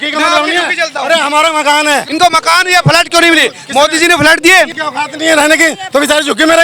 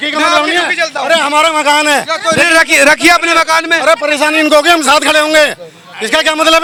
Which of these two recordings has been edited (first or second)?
first